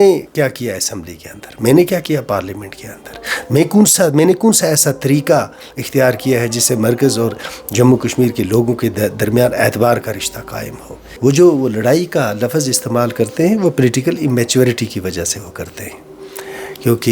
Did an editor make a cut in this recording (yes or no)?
yes